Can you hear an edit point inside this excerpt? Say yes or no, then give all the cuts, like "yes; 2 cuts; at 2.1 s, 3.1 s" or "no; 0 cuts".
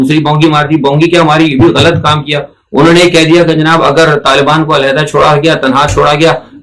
no; 0 cuts